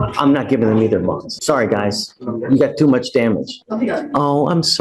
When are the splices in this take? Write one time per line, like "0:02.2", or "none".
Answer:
0:01.3
0:03.6